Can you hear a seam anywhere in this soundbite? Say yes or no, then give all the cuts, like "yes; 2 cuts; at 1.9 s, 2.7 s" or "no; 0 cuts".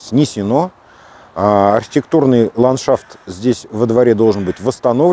no; 0 cuts